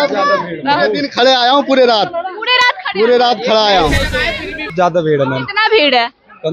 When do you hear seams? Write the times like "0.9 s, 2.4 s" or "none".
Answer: 4.7 s